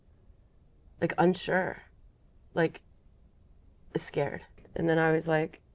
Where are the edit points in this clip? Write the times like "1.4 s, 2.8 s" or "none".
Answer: 4.5 s